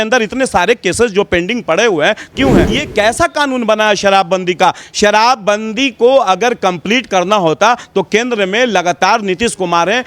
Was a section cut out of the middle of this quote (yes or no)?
yes